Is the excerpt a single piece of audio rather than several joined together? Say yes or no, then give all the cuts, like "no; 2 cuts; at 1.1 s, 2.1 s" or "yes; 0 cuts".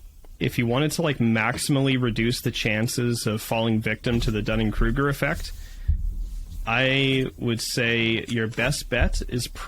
yes; 0 cuts